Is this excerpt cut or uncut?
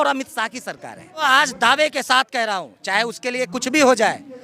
cut